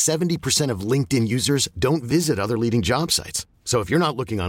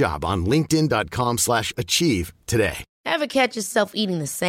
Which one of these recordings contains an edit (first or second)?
second